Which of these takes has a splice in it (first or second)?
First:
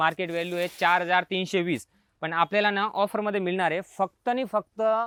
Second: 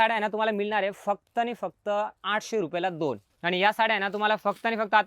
second